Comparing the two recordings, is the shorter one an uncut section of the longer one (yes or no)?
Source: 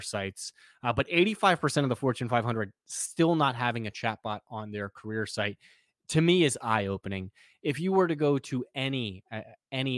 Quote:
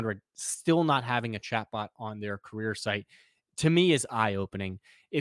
yes